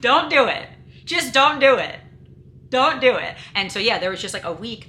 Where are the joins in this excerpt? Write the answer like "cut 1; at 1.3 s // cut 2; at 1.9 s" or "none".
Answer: cut 1; at 3.4 s